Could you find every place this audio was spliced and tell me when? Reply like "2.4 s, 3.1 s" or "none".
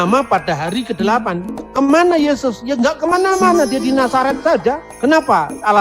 1.6 s